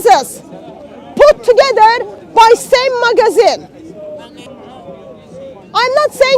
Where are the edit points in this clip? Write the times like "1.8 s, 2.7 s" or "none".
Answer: 4.5 s

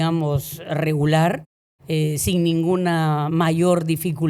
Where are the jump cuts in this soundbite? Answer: none

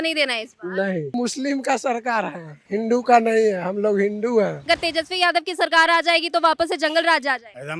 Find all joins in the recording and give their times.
1.1 s, 4.7 s

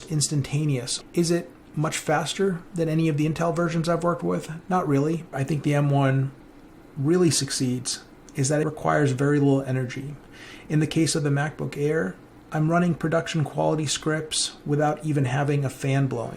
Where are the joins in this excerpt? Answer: 0.9 s, 5.3 s, 8.6 s

